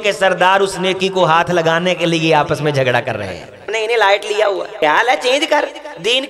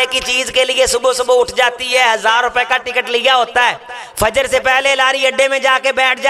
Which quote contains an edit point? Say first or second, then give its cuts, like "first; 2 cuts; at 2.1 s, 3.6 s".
first; 2 cuts; at 3.7 s, 4.8 s